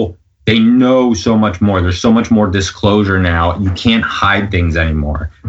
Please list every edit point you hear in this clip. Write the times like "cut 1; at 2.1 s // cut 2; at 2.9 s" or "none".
none